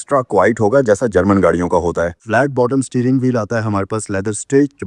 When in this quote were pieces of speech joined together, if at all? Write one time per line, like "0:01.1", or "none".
0:02.2